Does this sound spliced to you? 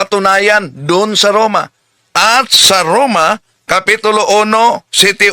yes; 1 cut; at 3.5 s

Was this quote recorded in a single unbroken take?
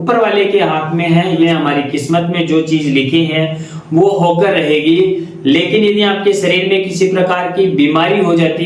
no; 1 cut; at 1.4 s

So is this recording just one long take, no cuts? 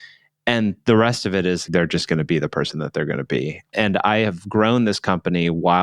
no; 2 cuts; at 1.6 s, 3.6 s

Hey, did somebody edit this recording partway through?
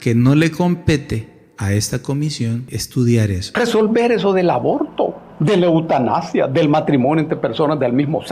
yes; 3 cuts; at 2.7 s, 3.4 s, 5.6 s

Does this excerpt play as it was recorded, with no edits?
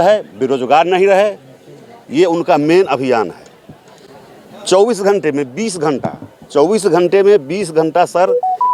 yes; 0 cuts

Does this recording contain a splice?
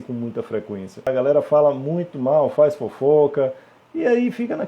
yes; 1 cut; at 1.1 s

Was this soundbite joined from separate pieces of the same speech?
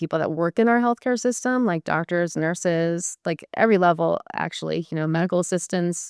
no; 0 cuts

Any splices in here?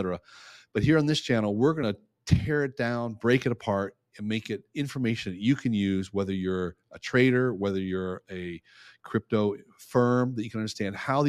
yes; 1 cut; at 1.8 s

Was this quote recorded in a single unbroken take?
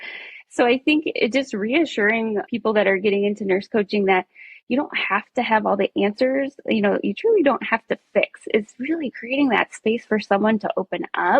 no; 1 cut; at 2.4 s

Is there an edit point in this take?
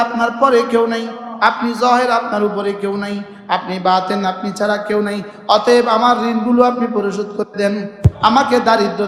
no; 0 cuts

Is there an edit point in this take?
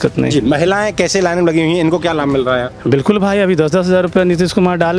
no; 0 cuts

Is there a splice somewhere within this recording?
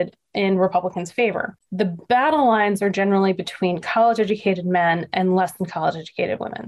yes; 1 cut; at 1.6 s

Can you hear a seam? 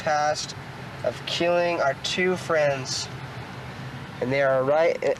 no; 0 cuts

